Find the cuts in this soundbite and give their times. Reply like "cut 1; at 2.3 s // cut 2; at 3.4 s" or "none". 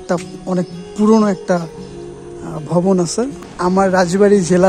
cut 1; at 3.4 s

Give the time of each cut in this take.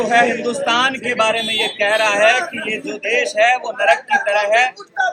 none

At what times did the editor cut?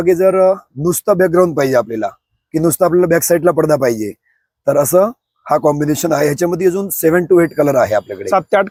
none

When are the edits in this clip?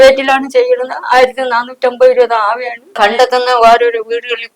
cut 1; at 2.8 s

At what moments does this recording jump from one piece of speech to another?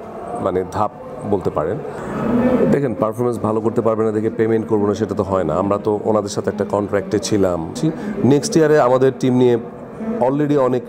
cut 1; at 2.0 s // cut 2; at 7.7 s

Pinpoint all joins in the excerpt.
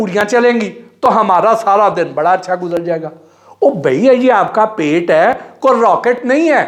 none

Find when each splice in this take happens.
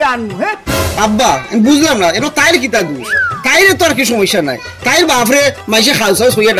none

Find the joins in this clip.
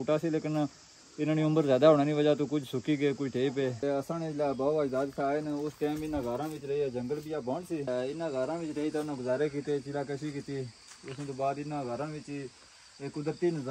cut 1; at 3.8 s // cut 2; at 7.9 s

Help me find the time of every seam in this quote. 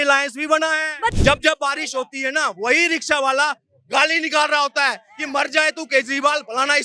cut 1; at 1.1 s

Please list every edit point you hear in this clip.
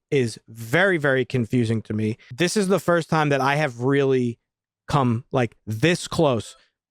cut 1; at 2.2 s

